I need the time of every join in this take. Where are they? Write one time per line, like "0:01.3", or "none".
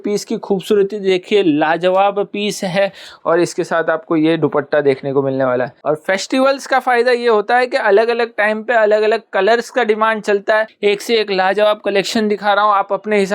0:05.7
0:10.7

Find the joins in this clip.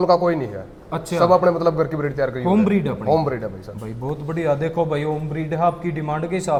none

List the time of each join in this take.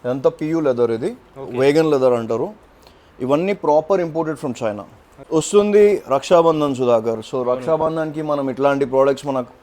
0:05.1

